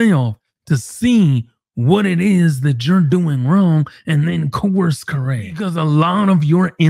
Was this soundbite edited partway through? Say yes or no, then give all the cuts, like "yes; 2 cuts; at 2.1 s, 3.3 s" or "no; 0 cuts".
yes; 1 cut; at 5.6 s